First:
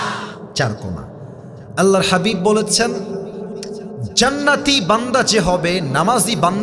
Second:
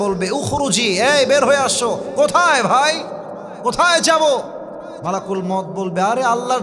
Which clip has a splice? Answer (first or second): second